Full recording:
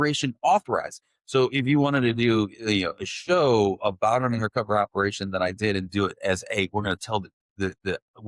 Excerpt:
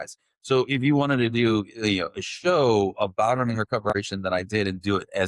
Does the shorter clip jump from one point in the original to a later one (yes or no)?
yes